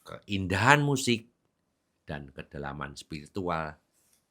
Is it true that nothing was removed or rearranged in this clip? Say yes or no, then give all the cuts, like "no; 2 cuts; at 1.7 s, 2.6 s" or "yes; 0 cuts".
yes; 0 cuts